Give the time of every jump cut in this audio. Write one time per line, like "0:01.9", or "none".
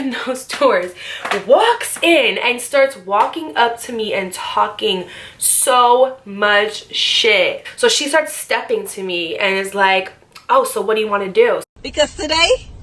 0:07.6
0:11.7